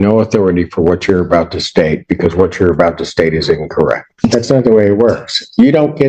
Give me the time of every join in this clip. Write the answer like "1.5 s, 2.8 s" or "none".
3.7 s